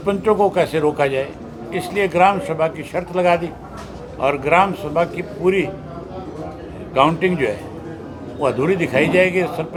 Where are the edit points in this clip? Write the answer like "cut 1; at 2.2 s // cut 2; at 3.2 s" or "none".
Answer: none